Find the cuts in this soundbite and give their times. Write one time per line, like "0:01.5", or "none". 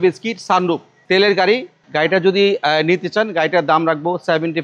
0:00.9
0:01.8